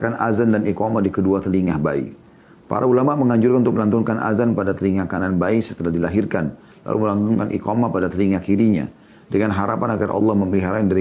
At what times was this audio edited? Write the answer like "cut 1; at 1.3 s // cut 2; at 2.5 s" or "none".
none